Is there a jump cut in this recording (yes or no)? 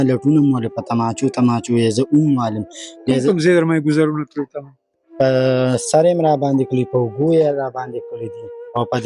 no